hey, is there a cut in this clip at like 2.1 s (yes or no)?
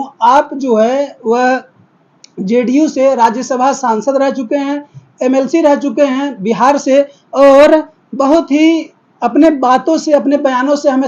no